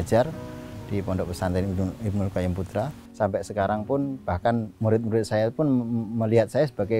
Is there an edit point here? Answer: yes; 1 cut; at 3.0 s

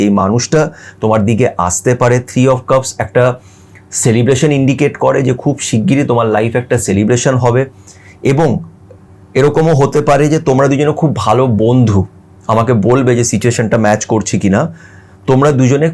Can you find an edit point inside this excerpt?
no; 0 cuts

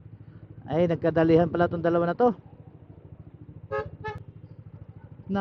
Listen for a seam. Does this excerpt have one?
yes; 1 cut; at 4.2 s

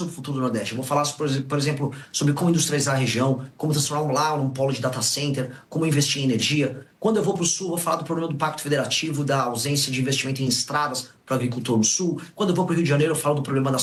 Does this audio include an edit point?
no; 0 cuts

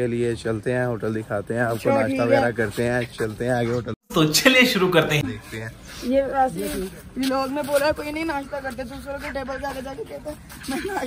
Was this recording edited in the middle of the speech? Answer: no; 0 cuts

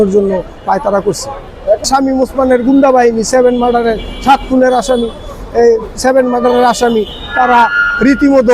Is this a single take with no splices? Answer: no; 1 cut; at 1.8 s

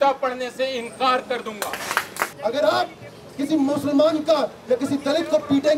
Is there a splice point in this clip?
yes; 1 cut; at 2.2 s

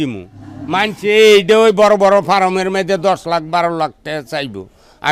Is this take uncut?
yes; 0 cuts

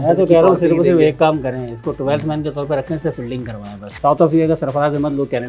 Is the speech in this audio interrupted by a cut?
yes; 1 cut; at 3.9 s

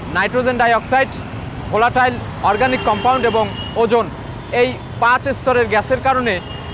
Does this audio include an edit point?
no; 0 cuts

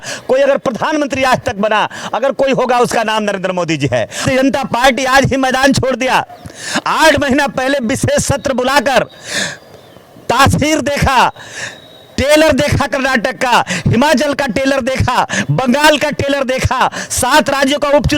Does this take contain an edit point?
yes; 1 cut; at 4.2 s

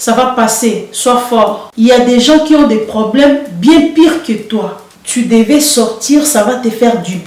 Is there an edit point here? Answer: yes; 2 cuts; at 1.6 s, 4.8 s

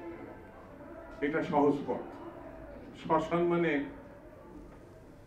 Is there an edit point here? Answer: no; 0 cuts

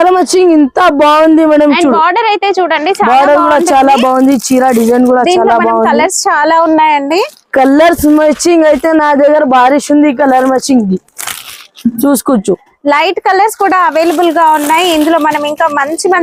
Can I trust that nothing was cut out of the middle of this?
yes; 0 cuts

